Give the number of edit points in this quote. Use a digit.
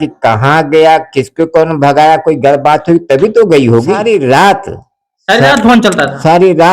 1